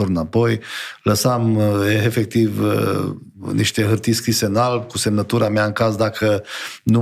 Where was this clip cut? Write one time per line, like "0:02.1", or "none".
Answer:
none

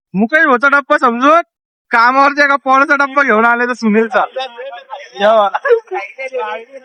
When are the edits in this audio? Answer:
none

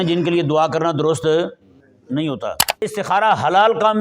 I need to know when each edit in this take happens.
0:02.8

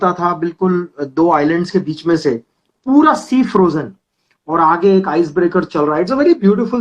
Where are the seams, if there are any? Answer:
none

